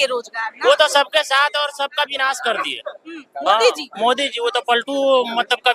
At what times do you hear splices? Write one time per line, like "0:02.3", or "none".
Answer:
none

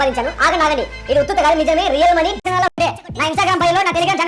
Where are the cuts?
0:02.4

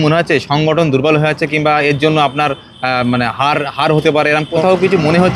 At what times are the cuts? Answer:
0:04.2

